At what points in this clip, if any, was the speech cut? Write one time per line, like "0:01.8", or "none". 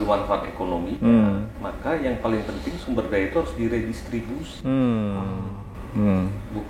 none